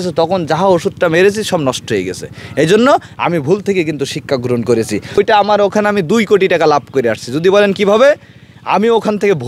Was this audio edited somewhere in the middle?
yes; 1 cut; at 5.2 s

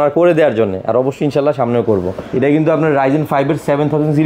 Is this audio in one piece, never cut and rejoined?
no; 1 cut; at 2.2 s

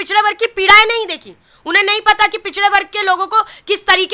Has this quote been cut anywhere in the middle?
no; 0 cuts

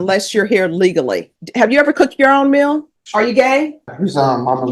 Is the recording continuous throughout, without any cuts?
no; 3 cuts; at 1.4 s, 3.0 s, 3.9 s

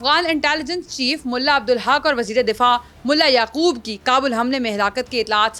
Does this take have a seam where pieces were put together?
no; 0 cuts

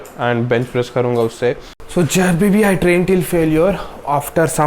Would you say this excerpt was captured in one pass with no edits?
no; 1 cut; at 1.9 s

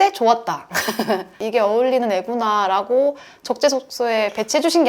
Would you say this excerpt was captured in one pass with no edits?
no; 1 cut; at 1.3 s

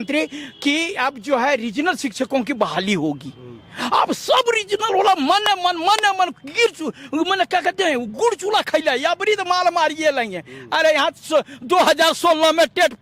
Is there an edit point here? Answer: no; 0 cuts

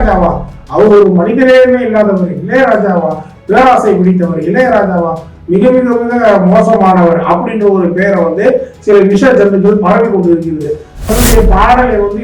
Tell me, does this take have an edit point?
yes; 1 cut; at 11.1 s

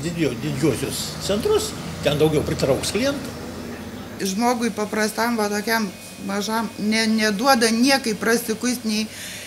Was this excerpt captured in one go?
yes; 0 cuts

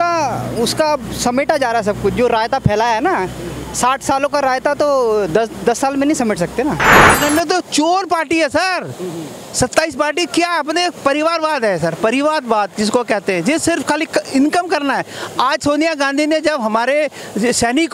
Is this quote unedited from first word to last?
no; 1 cut; at 7.2 s

